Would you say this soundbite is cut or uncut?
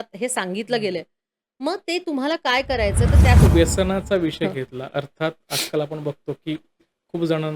cut